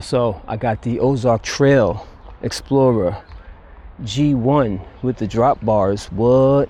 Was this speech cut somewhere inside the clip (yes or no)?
no